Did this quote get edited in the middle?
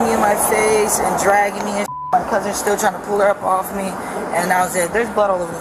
no; 0 cuts

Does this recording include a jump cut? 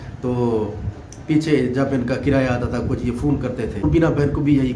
yes; 1 cut; at 3.8 s

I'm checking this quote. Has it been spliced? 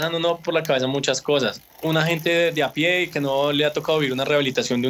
yes; 1 cut; at 1.7 s

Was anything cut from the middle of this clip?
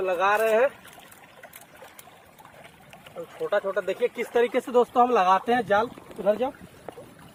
no; 0 cuts

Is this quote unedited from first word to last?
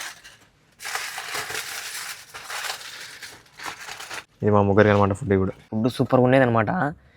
no; 2 cuts; at 4.3 s, 5.6 s

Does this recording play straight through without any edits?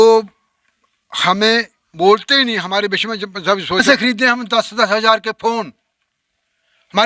no; 1 cut; at 3.8 s

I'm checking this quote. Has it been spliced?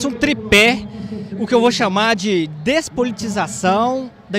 no; 0 cuts

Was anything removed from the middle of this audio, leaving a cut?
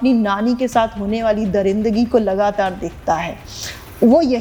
no; 0 cuts

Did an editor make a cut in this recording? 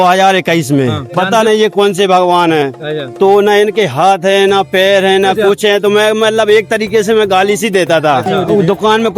yes; 2 cuts; at 1.0 s, 8.3 s

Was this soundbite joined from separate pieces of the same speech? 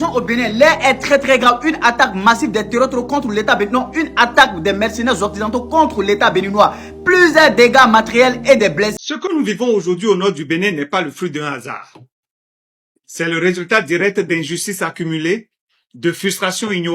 yes; 1 cut; at 8.9 s

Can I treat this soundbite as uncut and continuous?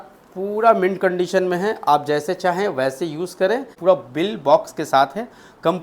no; 1 cut; at 3.7 s

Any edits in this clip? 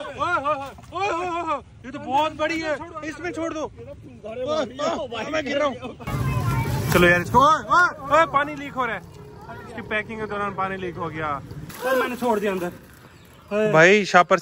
yes; 2 cuts; at 6.0 s, 11.6 s

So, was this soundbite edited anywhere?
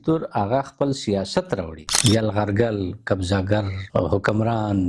yes; 1 cut; at 1.9 s

